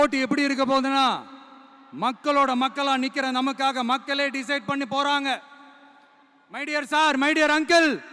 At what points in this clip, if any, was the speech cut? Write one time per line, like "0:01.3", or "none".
none